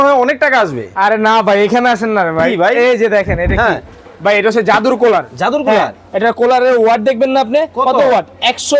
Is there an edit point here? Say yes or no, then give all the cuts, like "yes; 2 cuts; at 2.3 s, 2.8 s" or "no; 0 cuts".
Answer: no; 0 cuts